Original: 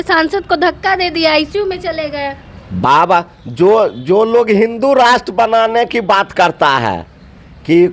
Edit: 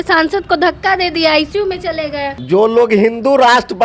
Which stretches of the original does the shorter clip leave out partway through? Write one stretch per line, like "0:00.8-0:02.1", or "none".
0:02.4-0:04.0